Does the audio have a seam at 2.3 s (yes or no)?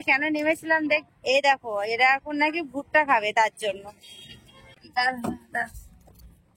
no